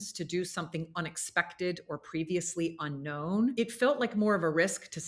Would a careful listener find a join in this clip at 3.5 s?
yes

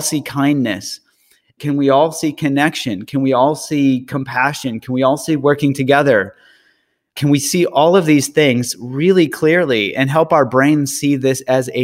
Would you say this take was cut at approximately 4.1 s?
no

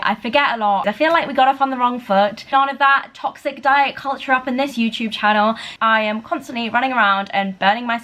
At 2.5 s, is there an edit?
yes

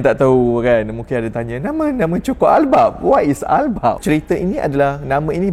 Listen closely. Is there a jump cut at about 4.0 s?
yes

